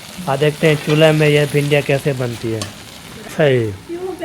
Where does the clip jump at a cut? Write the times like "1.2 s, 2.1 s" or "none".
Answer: 3.3 s

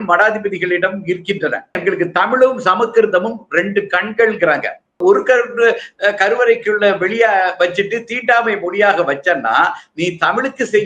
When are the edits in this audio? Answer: 1.8 s, 5.0 s

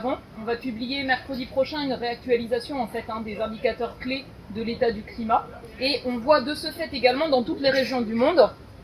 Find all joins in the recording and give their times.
5.6 s

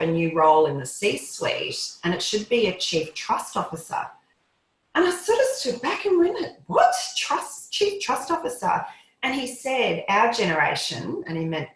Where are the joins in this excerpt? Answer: none

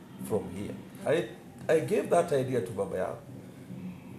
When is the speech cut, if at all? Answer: 0.9 s

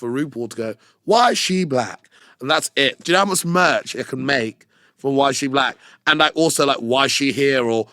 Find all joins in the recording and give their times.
none

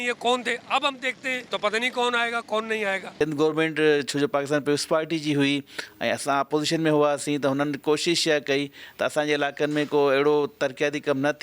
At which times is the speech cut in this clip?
1.4 s, 3.1 s

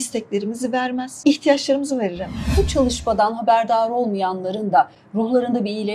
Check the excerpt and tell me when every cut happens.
1.1 s, 2.4 s

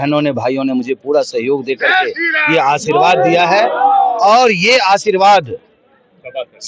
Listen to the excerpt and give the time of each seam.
none

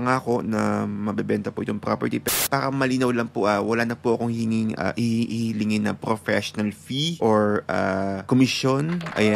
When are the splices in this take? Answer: 2.3 s, 7.1 s, 8.2 s

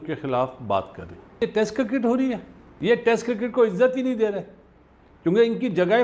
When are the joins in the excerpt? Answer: 1.4 s, 2.6 s

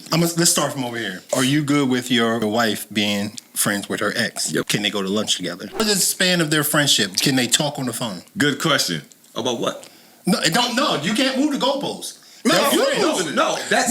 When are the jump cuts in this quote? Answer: 1.1 s, 2.4 s, 4.7 s, 5.8 s

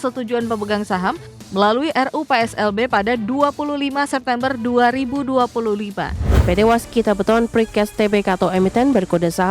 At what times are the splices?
6.3 s

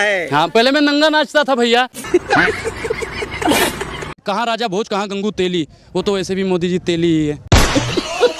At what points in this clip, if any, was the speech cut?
2.0 s, 4.0 s, 7.4 s

